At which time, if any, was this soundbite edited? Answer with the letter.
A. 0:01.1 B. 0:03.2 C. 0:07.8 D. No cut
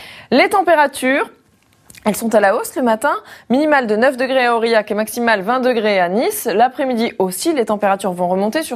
C